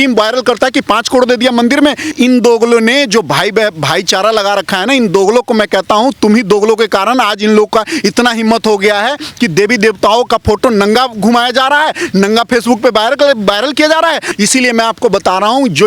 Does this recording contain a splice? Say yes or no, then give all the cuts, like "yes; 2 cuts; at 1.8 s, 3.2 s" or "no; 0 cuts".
yes; 2 cuts; at 2.1 s, 14.3 s